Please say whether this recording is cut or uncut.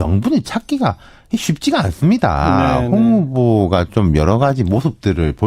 uncut